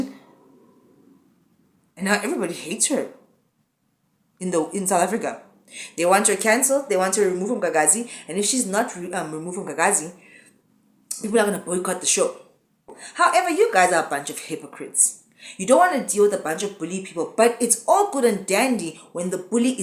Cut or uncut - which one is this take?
cut